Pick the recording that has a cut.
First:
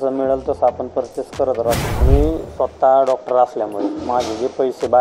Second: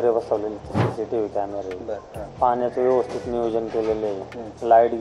first; 1 cut; at 1.9 s

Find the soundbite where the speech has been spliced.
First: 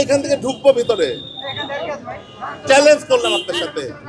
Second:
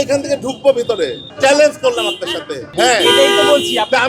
second; 2 cuts; at 1.2 s, 2.7 s

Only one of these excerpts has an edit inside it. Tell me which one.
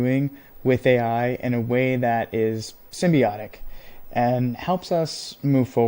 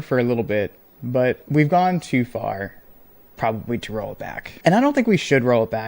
second; 2 cuts; at 1.4 s, 4.4 s

